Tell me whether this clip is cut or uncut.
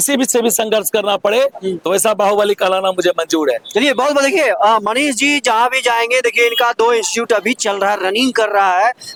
uncut